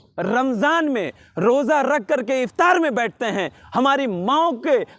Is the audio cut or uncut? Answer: uncut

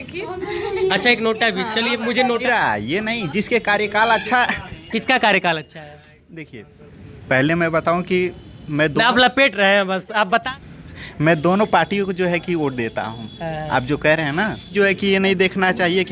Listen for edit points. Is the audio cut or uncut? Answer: cut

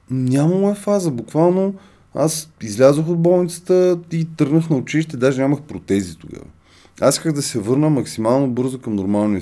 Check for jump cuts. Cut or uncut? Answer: uncut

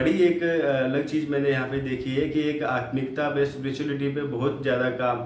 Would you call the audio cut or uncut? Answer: uncut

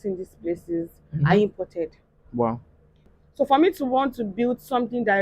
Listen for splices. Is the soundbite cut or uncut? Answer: cut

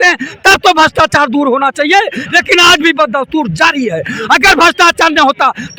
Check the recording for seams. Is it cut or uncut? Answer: uncut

